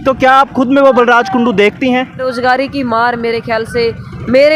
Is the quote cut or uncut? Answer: cut